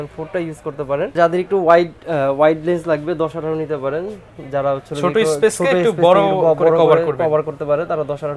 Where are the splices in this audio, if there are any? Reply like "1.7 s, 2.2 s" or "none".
1.2 s